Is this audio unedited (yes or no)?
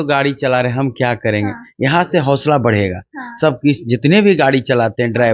yes